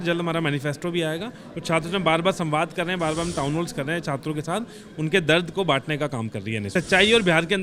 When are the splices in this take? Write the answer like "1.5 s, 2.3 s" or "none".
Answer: 6.7 s